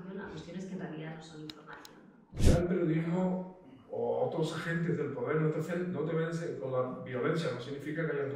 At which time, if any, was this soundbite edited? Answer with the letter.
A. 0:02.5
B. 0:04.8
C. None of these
A